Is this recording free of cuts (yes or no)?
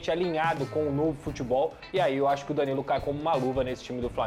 yes